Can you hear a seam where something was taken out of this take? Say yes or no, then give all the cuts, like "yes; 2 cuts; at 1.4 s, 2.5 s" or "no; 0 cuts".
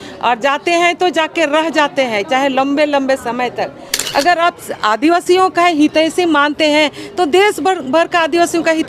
yes; 1 cut; at 3.9 s